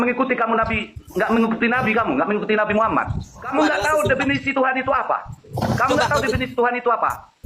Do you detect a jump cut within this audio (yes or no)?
yes